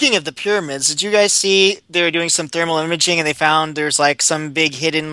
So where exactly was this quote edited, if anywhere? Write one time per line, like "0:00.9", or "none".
none